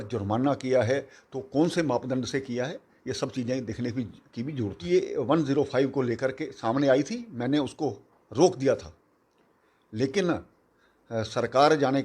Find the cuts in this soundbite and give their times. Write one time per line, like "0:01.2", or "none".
0:04.9